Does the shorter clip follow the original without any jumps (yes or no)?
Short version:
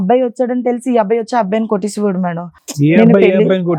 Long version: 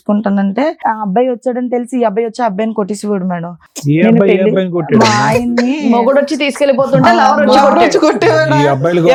yes